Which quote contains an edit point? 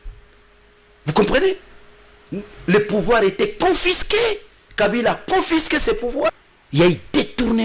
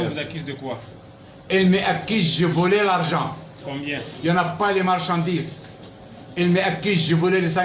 first; 1 cut; at 6.5 s

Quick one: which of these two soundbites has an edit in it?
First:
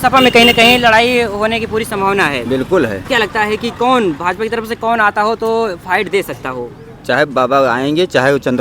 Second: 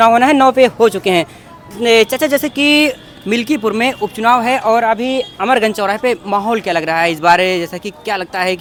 first; 1 cut; at 3.0 s

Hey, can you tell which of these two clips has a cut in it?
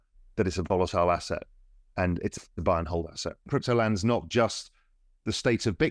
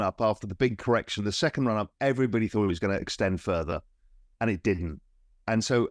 first; 1 cut; at 3.5 s

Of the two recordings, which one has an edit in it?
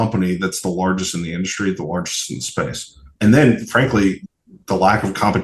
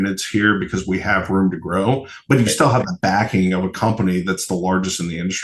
first; 2 cuts; at 3.1 s, 4.2 s

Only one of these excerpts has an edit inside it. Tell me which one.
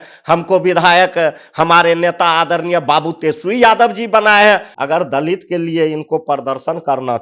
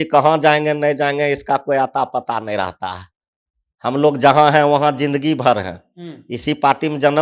first; 1 cut; at 4.7 s

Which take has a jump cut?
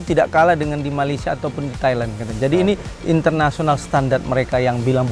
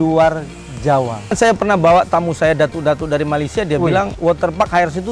second; 2 cuts; at 1.4 s, 4.1 s

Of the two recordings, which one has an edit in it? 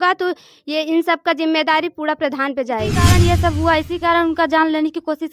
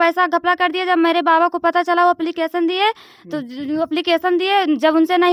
first; 1 cut; at 3.1 s

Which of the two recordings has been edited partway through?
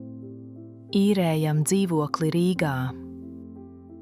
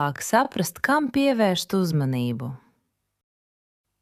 first; 2 cuts; at 0.9 s, 2.9 s

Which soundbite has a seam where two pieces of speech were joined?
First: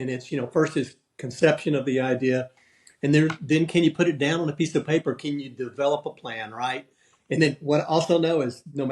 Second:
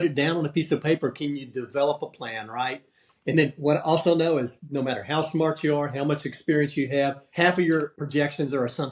second; 2 cuts; at 7.2 s, 8.0 s

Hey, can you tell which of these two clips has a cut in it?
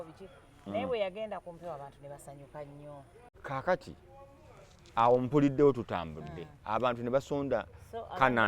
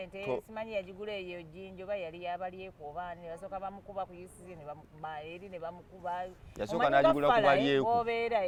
first; 1 cut; at 3.3 s

